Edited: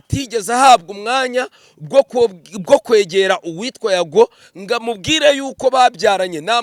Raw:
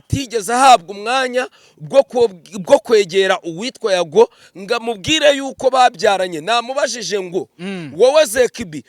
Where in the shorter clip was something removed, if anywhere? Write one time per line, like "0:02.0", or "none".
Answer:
none

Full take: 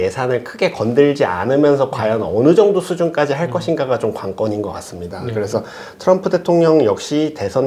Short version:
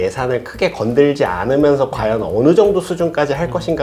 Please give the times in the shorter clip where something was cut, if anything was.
none

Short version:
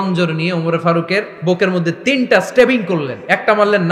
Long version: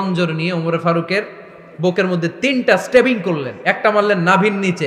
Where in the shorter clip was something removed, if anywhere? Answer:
0:01.3

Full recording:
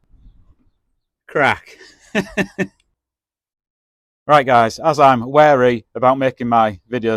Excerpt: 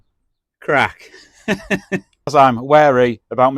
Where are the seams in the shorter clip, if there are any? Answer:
0:02.3

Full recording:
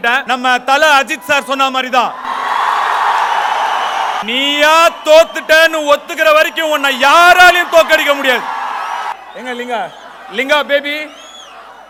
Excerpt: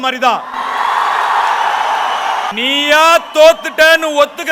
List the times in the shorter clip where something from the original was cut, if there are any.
none

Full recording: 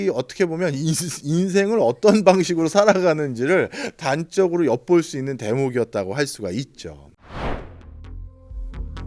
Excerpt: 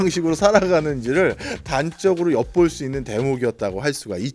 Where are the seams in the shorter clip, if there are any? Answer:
none

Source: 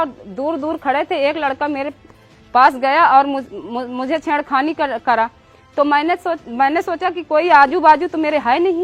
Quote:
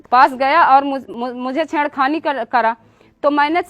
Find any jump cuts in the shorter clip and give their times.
0:01.1

